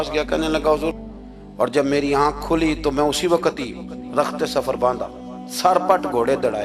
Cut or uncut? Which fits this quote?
cut